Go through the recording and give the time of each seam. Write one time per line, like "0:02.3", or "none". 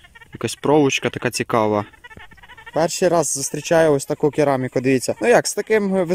0:02.7
0:05.1